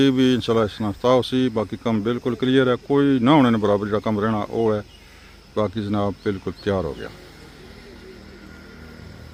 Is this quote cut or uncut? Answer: uncut